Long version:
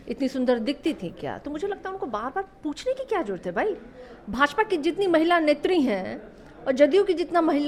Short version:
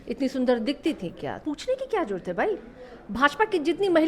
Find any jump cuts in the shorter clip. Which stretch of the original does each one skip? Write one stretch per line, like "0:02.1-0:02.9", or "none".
0:01.4-0:02.5

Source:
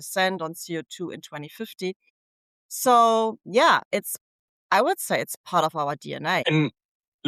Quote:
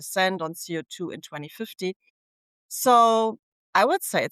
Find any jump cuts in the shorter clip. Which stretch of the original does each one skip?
0:03.4-0:04.4

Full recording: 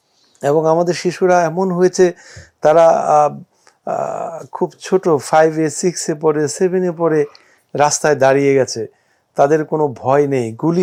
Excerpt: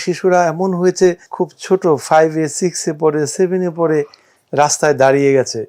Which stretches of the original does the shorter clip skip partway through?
0:02.2-0:04.5

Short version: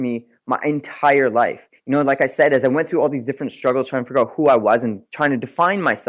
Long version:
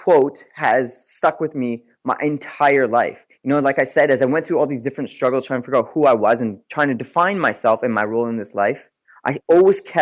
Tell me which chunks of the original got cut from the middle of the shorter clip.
none

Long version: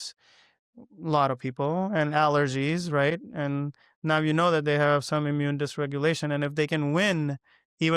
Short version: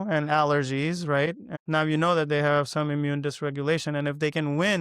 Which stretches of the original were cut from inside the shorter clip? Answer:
0:03.3-0:03.8

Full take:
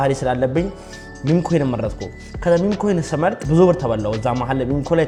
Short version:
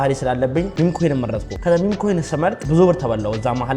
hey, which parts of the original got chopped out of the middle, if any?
0:01.2-0:02.0

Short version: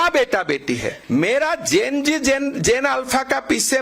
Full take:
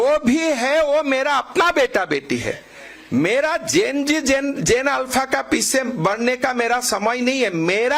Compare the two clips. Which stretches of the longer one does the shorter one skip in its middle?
0:02.6-0:03.0

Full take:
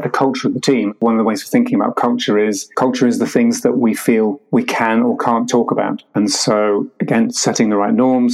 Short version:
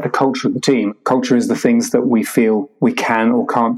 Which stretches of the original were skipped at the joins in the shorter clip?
0:00.9-0:02.7

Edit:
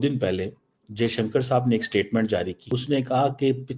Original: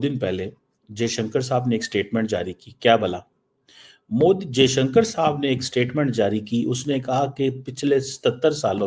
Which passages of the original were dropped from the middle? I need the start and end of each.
0:02.7-0:06.7

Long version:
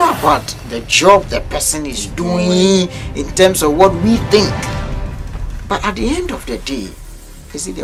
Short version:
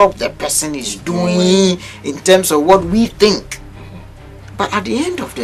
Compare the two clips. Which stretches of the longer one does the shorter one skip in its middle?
none

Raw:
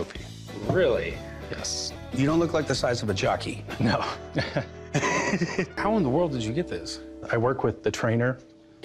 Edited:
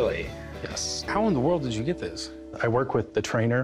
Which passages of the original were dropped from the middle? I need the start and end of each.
0:01.9-0:05.7

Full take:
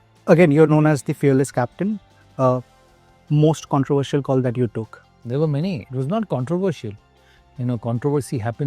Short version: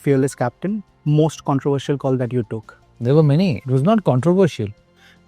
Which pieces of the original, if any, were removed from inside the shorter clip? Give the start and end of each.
0:02.1-0:03.2

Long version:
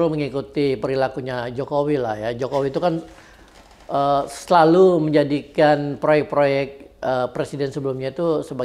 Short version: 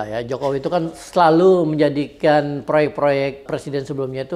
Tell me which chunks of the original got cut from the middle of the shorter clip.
0:03.1-0:04.3
0:06.8-0:07.3

